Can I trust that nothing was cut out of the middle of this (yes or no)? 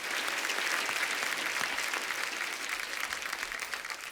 yes